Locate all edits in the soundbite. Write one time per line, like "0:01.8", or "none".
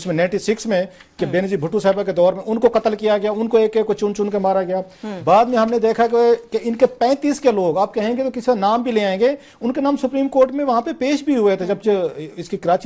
0:09.2

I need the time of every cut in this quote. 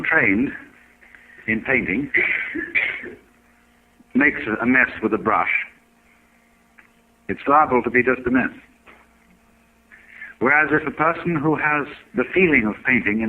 0:05.7

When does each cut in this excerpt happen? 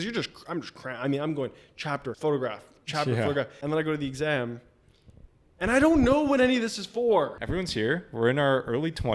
0:02.2
0:03.6
0:07.4

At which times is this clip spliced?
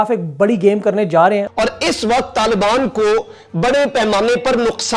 0:01.4

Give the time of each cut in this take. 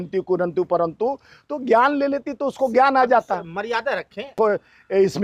0:04.3

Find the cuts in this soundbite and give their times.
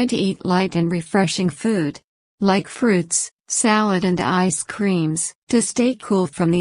0:05.3

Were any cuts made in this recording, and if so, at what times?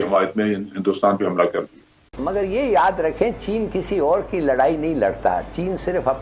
0:02.1

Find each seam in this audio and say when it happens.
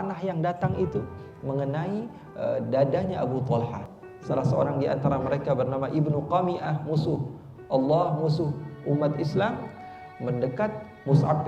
0:03.8

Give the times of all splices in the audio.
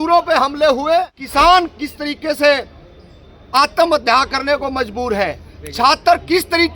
0:01.2

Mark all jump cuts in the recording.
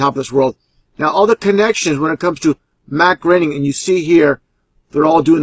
0:01.0

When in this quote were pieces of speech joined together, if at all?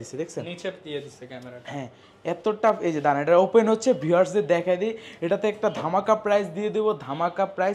none

